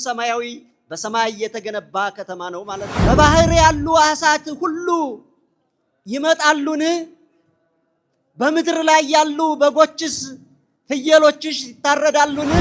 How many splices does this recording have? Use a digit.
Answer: 1